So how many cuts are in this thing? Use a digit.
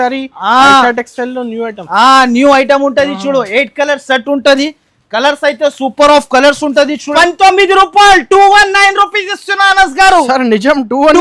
1